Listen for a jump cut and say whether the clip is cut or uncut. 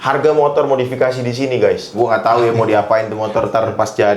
cut